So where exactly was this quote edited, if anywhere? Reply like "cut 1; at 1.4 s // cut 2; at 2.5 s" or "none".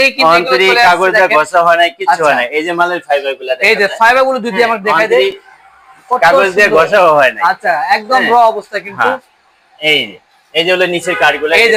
none